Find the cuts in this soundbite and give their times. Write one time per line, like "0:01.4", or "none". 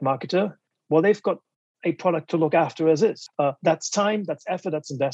0:03.2

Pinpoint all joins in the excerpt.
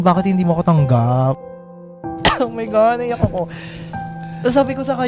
0:01.5

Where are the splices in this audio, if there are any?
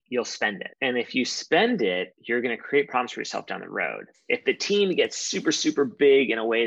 none

